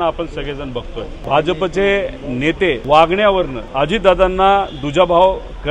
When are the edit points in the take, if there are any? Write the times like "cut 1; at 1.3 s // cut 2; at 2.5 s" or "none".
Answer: cut 1; at 1.2 s // cut 2; at 2.8 s // cut 3; at 3.6 s

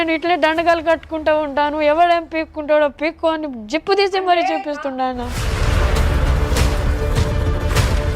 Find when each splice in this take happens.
cut 1; at 5.4 s

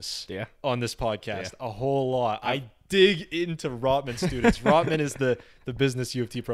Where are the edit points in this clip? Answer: none

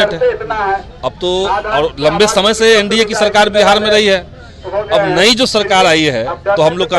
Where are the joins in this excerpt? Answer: none

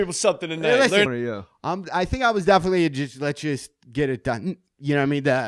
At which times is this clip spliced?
none

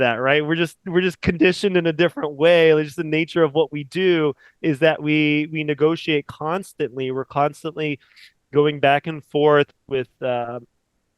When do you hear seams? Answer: cut 1; at 9.8 s

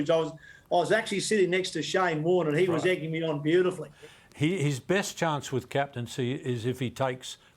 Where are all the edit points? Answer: cut 1; at 3.9 s

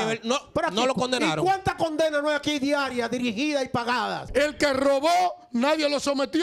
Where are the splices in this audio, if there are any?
cut 1; at 4.2 s

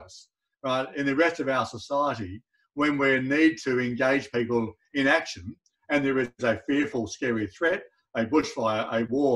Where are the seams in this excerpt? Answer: none

